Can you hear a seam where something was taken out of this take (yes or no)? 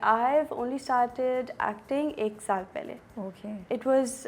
no